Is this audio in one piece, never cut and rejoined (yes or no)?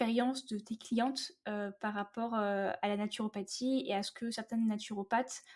yes